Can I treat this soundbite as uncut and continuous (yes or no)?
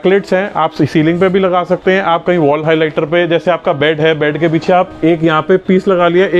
yes